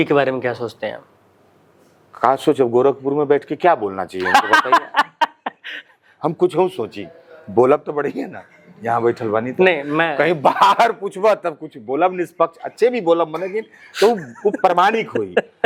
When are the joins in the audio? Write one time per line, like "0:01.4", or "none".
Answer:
none